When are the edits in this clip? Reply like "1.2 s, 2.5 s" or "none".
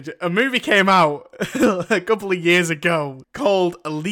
3.2 s